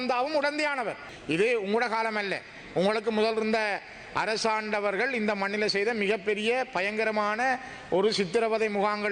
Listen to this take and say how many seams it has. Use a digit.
1